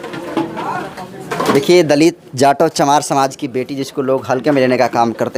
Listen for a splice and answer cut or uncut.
uncut